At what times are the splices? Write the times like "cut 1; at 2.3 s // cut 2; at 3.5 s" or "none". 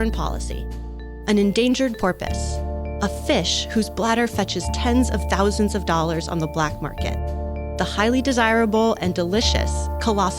none